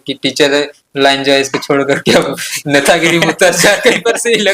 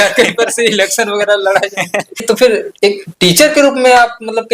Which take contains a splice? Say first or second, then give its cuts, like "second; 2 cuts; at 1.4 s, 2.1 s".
second; 1 cut; at 2.2 s